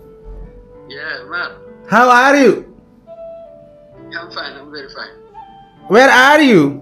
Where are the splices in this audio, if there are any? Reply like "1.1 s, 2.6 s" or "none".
none